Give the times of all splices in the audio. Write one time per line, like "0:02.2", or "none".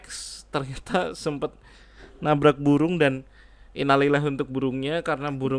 none